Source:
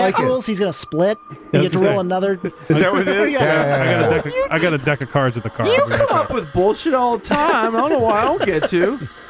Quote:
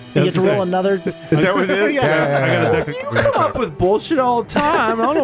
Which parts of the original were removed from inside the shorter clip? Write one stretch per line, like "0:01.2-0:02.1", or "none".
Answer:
0:04.5-0:05.8